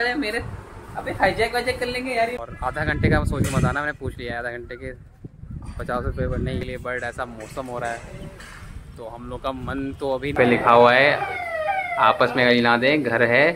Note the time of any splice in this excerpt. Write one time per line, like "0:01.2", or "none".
0:02.4
0:06.6
0:10.3